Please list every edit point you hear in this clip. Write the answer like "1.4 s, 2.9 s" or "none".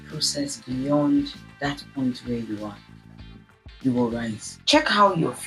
4.5 s